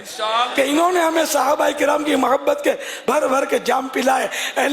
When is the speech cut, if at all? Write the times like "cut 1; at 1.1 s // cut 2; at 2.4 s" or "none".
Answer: none